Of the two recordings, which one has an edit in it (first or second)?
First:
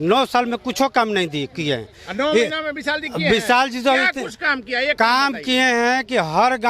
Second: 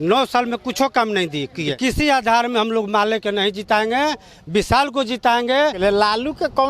second